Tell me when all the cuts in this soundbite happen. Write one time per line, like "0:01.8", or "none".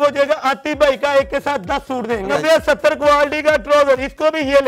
0:02.3